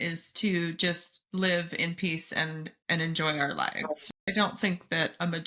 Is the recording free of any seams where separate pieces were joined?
no; 1 cut; at 4.1 s

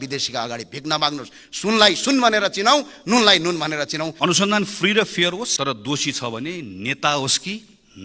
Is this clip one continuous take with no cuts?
no; 2 cuts; at 4.1 s, 5.5 s

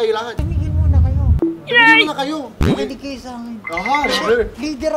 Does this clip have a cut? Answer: no; 0 cuts

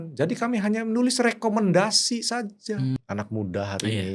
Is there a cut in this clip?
yes; 1 cut; at 3.0 s

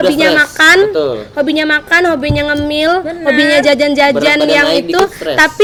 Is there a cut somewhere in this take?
no; 0 cuts

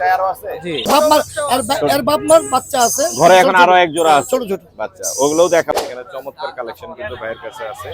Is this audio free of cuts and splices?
no; 2 cuts; at 0.9 s, 5.7 s

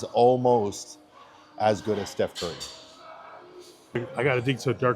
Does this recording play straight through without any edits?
no; 1 cut; at 4.0 s

